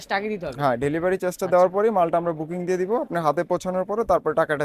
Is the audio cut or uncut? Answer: uncut